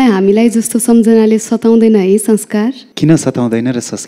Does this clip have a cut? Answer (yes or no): yes